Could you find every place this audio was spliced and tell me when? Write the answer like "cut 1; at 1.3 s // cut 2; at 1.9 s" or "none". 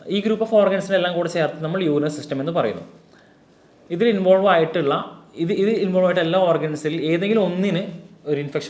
none